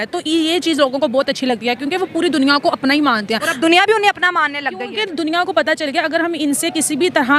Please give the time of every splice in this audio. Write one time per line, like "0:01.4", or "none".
none

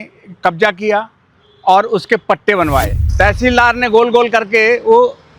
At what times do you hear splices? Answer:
0:03.0

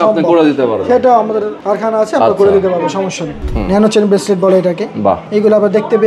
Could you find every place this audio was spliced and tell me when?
0:01.6
0:03.3
0:05.2

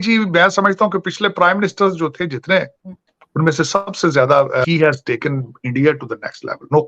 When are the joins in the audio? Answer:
0:04.6

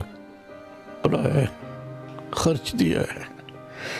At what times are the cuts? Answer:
none

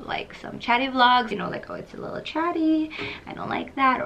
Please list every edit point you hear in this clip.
0:01.3

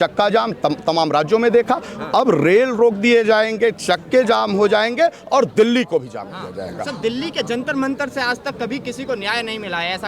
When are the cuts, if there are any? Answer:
none

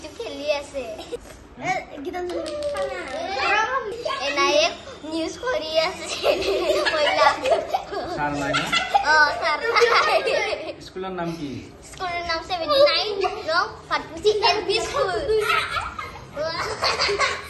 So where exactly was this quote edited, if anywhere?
0:01.1
0:03.9

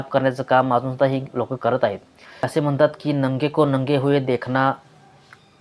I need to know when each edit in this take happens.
0:02.5

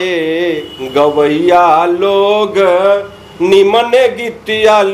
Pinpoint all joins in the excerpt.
none

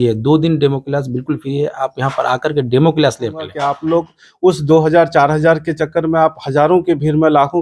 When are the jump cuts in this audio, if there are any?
0:03.6

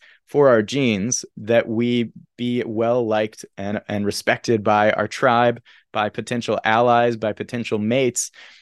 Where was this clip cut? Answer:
0:01.3

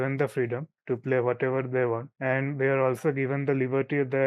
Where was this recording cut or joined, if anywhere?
none

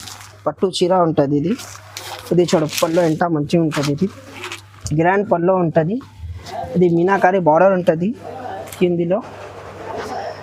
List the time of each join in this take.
none

